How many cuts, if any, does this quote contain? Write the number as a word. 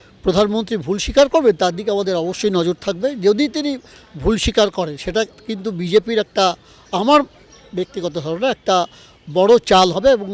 zero